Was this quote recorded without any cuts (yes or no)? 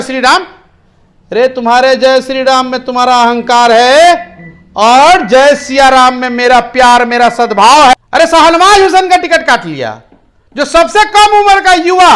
no